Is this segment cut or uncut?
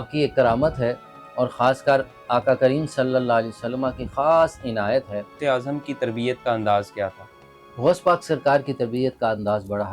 cut